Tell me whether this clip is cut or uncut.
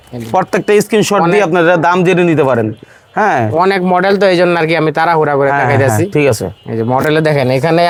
uncut